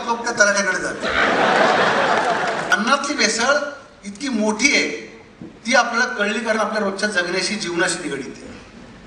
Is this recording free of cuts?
no; 1 cut; at 2.7 s

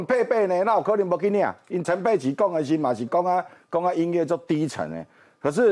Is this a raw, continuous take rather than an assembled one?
no; 1 cut; at 1.8 s

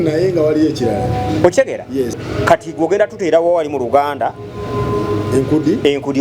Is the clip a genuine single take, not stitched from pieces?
no; 1 cut; at 2.2 s

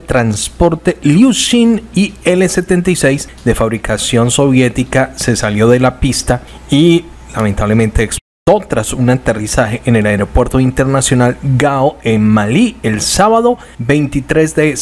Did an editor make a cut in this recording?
no; 0 cuts

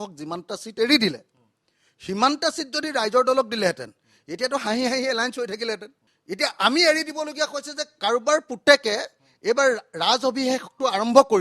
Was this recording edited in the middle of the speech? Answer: no; 0 cuts

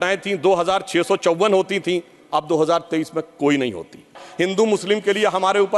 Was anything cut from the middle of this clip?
yes; 1 cut; at 4.2 s

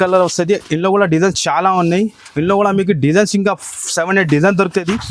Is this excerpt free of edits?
yes; 0 cuts

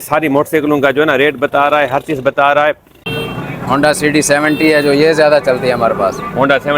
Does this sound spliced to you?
yes; 1 cut; at 3.1 s

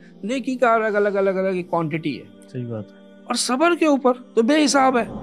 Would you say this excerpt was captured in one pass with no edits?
no; 1 cut; at 4.2 s

